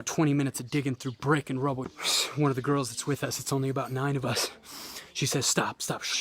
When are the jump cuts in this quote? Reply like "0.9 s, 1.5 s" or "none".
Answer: 2.0 s